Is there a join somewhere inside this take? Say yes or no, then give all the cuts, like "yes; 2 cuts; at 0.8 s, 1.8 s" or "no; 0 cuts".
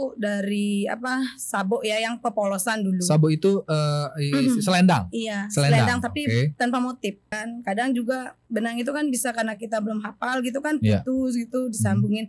yes; 1 cut; at 7.5 s